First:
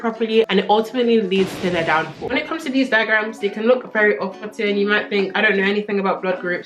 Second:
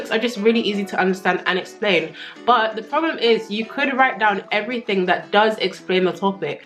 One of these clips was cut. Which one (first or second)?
first